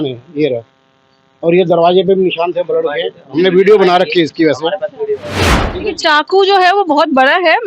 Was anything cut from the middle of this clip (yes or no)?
yes